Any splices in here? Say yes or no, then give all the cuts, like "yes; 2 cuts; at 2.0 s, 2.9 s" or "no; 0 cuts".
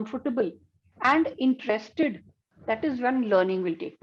no; 0 cuts